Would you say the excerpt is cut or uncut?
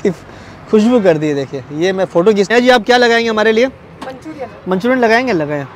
cut